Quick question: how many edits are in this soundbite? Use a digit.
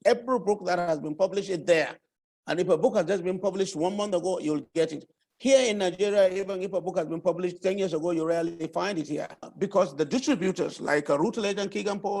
1